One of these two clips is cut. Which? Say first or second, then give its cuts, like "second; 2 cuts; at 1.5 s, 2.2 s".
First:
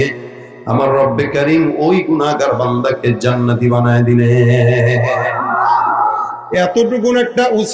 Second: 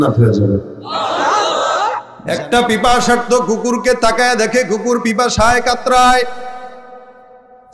second; 1 cut; at 2.1 s